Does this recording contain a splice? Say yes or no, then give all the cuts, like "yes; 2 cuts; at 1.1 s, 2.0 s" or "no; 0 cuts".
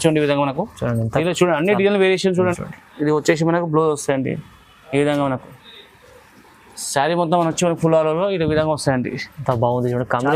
yes; 1 cut; at 2.6 s